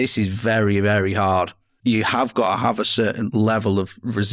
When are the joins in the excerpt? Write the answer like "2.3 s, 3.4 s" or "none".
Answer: 1.7 s, 3.3 s

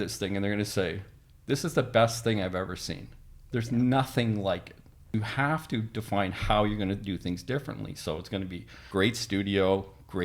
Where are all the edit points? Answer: 5.1 s, 8.8 s

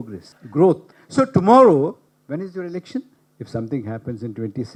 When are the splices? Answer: none

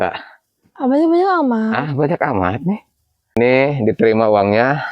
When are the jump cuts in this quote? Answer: 3.4 s

